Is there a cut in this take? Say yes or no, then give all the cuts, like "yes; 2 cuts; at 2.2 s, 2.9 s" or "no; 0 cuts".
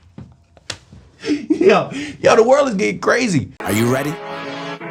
yes; 1 cut; at 3.6 s